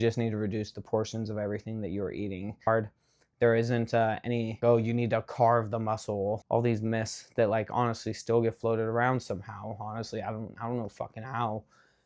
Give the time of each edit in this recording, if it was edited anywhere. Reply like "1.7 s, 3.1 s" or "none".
2.7 s, 4.6 s, 6.4 s